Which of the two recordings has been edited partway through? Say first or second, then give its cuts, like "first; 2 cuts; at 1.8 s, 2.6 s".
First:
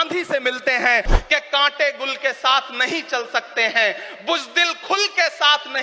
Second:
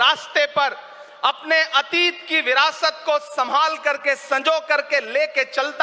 first; 1 cut; at 1.1 s